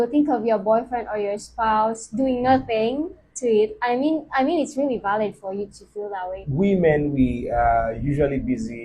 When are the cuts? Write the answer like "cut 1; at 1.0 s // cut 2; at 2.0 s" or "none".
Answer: cut 1; at 6.4 s